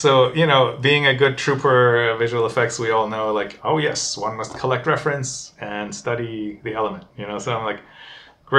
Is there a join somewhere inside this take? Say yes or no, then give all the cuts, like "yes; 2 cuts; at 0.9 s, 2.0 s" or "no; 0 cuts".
no; 0 cuts